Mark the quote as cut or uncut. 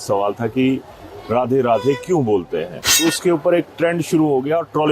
cut